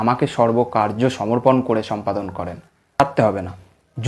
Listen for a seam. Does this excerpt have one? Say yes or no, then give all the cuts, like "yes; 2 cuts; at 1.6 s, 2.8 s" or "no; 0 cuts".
yes; 1 cut; at 3.0 s